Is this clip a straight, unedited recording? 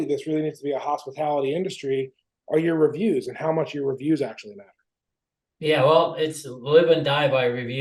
yes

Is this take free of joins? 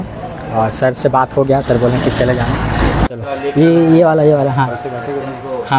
no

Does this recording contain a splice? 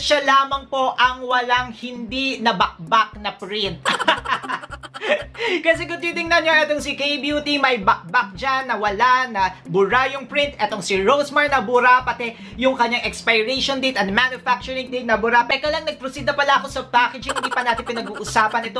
no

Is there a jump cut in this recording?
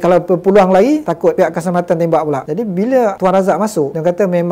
no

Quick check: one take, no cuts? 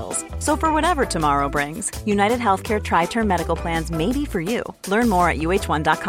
yes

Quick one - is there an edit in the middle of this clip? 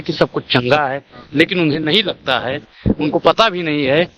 no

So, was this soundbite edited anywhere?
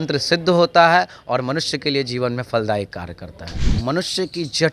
yes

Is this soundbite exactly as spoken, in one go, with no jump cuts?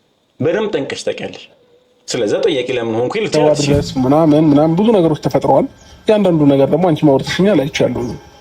no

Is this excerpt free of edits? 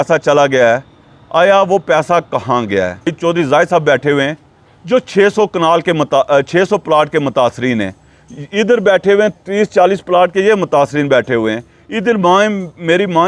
no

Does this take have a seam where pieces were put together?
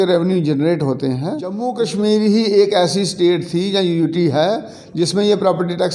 yes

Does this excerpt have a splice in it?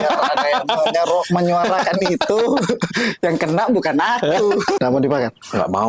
yes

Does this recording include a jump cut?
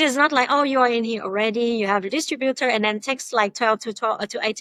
no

